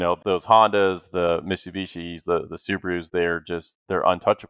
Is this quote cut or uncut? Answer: uncut